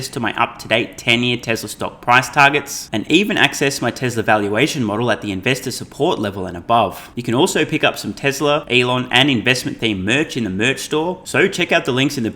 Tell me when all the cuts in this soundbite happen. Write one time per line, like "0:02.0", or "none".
0:07.1
0:08.7
0:11.2